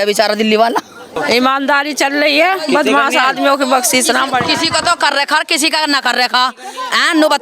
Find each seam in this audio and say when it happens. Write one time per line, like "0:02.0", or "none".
0:01.1